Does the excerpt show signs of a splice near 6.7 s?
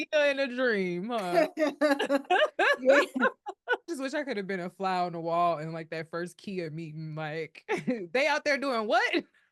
no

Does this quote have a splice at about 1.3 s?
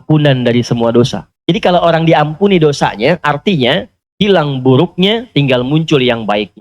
yes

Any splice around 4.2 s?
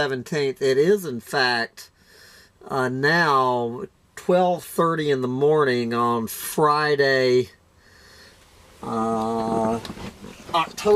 no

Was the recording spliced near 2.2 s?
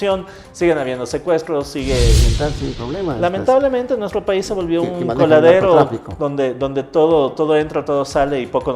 yes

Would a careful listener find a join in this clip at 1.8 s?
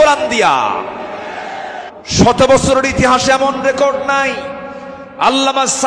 yes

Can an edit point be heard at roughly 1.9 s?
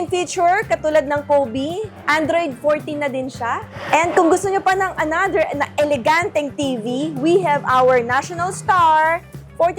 yes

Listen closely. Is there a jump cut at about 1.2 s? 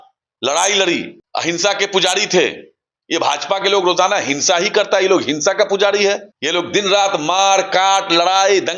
yes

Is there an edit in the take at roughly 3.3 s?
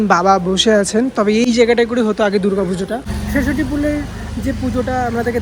yes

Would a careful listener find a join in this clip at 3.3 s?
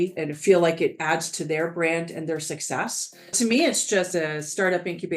yes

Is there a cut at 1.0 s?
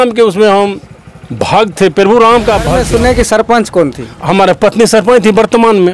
no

